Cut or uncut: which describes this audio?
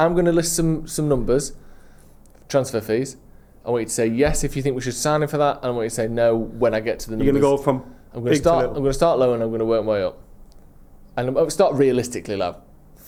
uncut